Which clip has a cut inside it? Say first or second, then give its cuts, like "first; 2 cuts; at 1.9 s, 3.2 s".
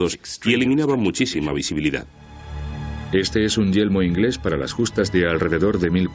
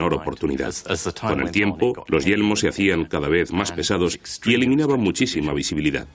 second; 1 cut; at 2.2 s